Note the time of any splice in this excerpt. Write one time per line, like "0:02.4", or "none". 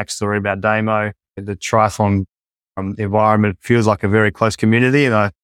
0:01.3